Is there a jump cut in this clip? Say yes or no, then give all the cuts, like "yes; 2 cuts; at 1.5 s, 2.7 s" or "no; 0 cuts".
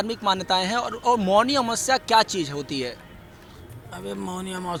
no; 0 cuts